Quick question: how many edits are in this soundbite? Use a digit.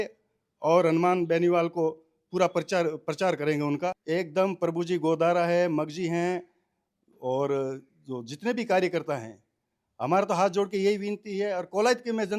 1